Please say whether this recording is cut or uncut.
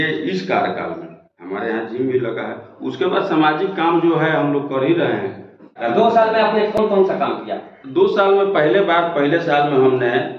cut